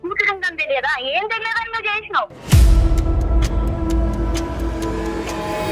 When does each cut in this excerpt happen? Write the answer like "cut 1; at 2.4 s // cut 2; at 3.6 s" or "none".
cut 1; at 2.3 s